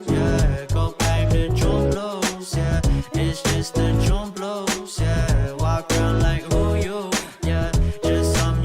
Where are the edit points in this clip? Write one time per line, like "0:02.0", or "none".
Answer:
0:01.0